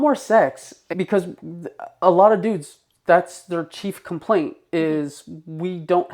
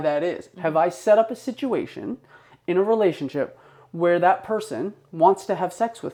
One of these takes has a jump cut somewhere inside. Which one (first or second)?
first